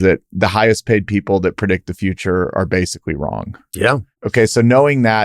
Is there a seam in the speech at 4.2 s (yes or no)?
yes